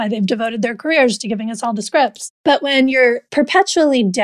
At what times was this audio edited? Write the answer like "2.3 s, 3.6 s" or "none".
2.3 s, 3.2 s